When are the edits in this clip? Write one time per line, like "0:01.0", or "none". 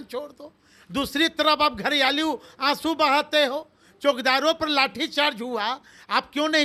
none